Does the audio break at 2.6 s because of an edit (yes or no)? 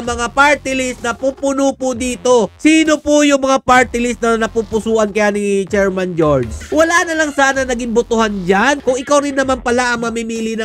no